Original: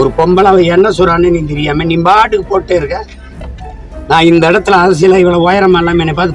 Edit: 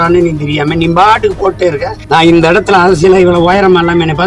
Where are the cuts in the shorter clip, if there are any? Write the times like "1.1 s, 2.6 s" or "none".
1.9 s

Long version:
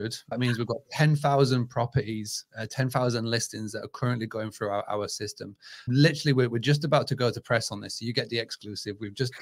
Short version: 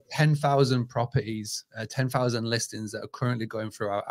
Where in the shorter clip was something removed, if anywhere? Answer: none

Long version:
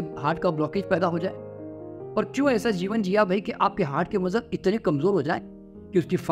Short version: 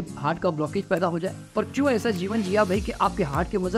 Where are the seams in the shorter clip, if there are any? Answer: 1.4 s

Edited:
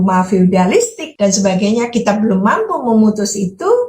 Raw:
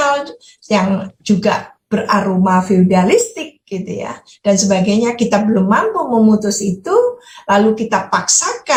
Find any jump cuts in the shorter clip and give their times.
1.0 s

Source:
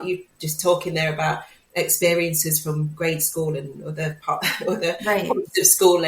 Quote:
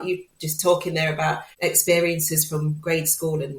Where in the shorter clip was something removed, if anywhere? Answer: 1.5 s

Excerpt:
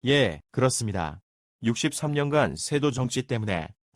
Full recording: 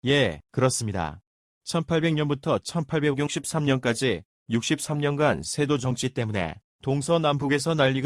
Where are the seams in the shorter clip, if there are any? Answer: 1.5 s

